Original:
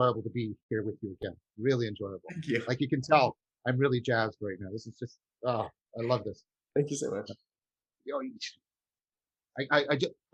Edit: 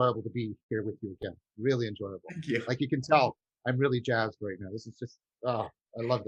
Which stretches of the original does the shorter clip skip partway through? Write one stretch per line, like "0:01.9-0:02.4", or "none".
none

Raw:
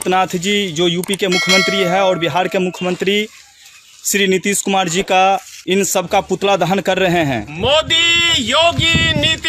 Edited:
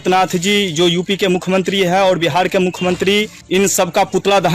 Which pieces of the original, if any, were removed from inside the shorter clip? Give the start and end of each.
0:03.4-0:05.5

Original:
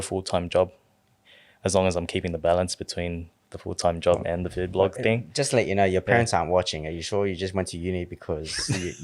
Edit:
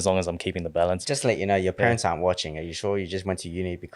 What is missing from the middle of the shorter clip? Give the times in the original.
0:02.7-0:05.3

